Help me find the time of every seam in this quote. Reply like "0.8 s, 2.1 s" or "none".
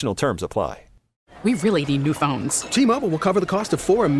1.3 s